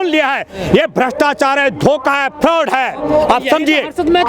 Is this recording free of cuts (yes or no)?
yes